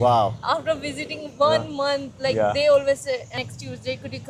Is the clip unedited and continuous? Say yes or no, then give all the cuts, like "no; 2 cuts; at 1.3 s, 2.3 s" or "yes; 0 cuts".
yes; 0 cuts